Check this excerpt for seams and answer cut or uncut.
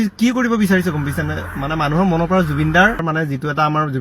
cut